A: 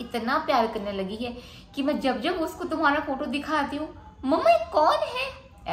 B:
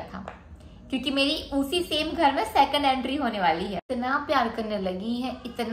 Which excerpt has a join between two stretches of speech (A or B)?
B